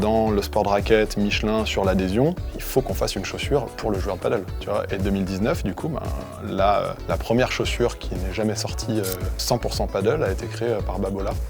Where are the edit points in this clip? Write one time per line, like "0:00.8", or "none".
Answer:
none